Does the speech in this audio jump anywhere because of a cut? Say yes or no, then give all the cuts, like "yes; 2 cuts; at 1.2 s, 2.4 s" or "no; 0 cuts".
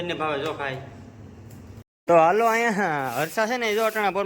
yes; 1 cut; at 1.9 s